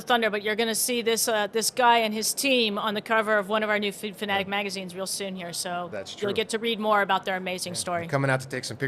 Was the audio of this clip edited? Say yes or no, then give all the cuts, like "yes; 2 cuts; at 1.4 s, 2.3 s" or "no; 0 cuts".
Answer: no; 0 cuts